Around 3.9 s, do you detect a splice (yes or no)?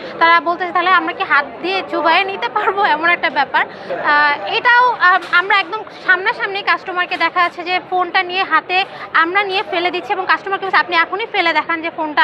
yes